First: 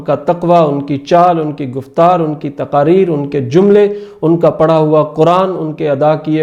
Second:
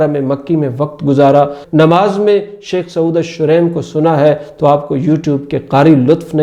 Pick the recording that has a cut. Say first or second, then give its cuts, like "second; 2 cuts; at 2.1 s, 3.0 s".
second; 1 cut; at 1.6 s